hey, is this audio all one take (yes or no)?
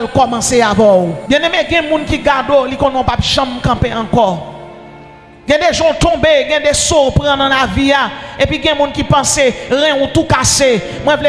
no